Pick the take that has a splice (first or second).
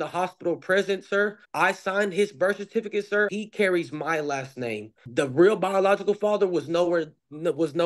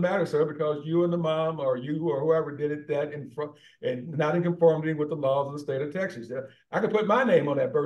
first